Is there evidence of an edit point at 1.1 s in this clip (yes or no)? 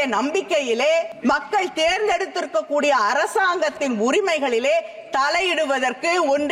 yes